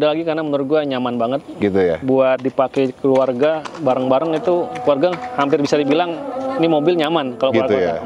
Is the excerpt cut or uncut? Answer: uncut